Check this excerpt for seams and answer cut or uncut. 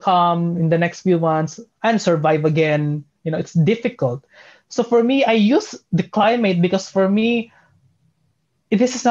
uncut